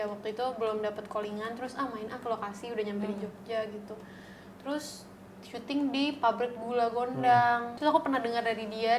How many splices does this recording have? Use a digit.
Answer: 1